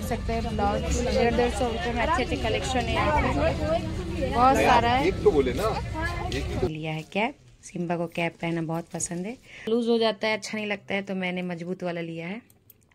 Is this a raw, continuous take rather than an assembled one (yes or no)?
no